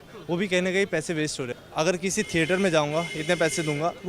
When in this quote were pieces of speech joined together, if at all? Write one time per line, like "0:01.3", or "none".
0:01.5